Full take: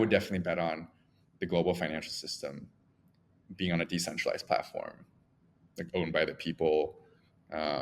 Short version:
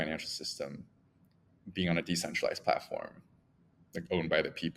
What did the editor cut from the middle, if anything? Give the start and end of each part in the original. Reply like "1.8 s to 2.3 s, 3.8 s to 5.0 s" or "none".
none

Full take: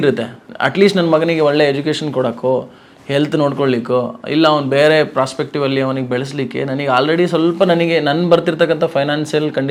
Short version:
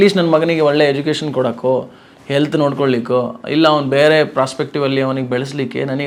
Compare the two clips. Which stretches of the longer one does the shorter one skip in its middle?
none

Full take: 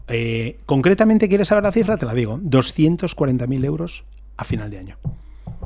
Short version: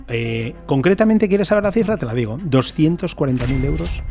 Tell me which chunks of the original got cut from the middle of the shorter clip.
none

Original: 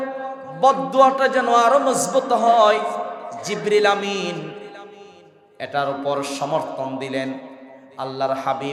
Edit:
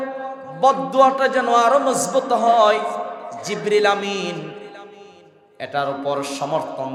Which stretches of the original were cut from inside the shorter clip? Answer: none

